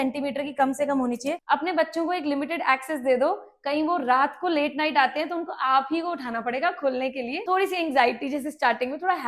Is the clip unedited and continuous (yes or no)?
no